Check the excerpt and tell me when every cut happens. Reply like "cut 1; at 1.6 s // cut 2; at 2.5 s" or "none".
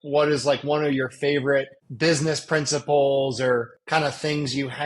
cut 1; at 1.8 s // cut 2; at 3.8 s